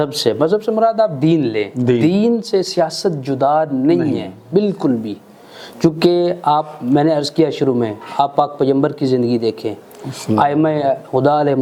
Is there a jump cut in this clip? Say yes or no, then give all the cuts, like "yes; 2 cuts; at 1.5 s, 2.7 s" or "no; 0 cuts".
no; 0 cuts